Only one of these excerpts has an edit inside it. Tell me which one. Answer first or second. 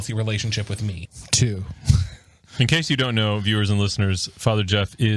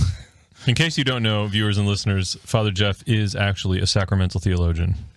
first